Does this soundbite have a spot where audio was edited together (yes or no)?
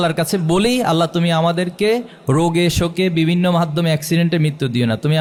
no